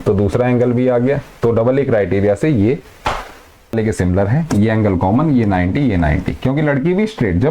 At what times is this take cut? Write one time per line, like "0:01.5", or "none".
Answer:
0:03.7